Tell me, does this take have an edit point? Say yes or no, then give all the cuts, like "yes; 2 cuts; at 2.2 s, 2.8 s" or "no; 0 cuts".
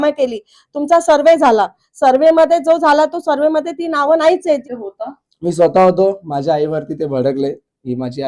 yes; 1 cut; at 4.7 s